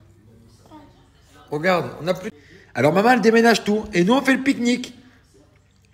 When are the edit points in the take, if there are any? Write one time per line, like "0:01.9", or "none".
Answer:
0:02.3